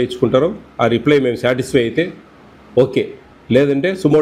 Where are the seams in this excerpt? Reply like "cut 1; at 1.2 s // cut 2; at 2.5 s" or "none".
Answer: none